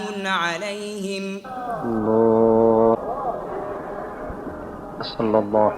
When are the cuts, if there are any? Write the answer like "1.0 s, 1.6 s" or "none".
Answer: 1.7 s